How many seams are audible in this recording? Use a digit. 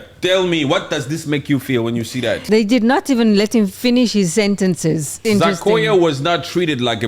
2